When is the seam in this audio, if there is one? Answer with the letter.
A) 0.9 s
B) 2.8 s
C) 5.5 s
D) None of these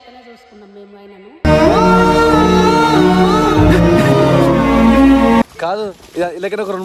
C